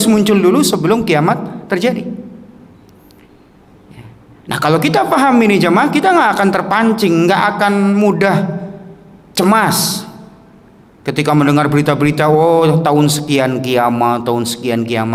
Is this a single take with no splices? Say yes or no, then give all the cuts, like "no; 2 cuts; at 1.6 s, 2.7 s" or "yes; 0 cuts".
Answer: yes; 0 cuts